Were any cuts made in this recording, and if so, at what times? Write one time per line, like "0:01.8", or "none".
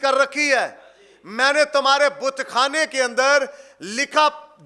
none